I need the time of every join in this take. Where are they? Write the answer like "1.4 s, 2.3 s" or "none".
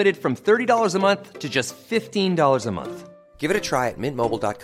none